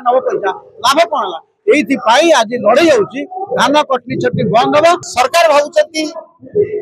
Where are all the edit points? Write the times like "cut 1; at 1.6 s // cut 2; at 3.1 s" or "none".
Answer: cut 1; at 5.0 s